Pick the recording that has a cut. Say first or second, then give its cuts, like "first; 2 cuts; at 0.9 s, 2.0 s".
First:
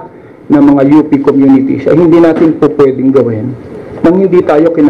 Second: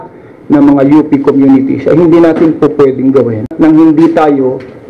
second; 1 cut; at 3.5 s